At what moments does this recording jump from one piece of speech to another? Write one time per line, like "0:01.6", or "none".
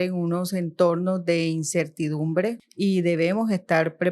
0:02.7